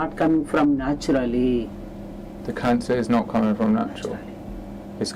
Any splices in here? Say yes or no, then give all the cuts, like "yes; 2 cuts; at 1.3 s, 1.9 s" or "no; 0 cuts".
no; 0 cuts